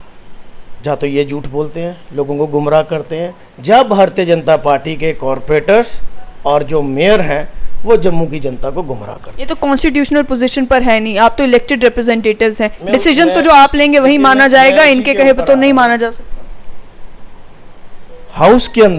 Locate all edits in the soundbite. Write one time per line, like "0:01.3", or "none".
none